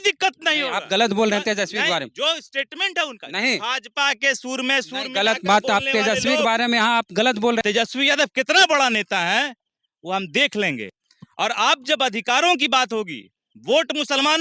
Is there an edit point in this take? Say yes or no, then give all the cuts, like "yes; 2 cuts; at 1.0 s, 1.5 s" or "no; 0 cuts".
yes; 1 cut; at 7.6 s